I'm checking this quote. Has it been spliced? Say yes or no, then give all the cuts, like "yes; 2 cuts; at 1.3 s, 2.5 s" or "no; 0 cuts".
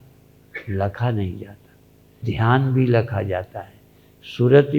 yes; 1 cut; at 2.3 s